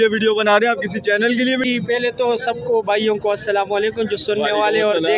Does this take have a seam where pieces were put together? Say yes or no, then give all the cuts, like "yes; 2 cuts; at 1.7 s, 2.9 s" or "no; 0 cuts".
no; 0 cuts